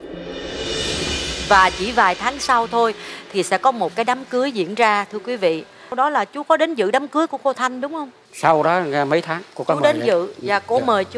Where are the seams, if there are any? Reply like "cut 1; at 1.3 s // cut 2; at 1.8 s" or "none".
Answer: cut 1; at 5.9 s